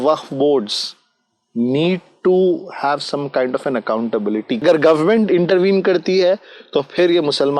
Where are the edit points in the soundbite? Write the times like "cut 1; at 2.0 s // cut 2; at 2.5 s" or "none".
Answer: cut 1; at 4.6 s